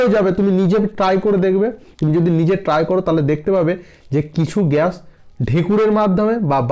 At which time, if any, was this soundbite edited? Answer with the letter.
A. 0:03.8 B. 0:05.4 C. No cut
C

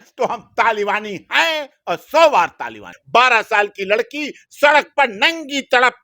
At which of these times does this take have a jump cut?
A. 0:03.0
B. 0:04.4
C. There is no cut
A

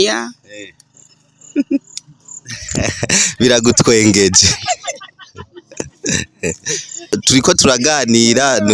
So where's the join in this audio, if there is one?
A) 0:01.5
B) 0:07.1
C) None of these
B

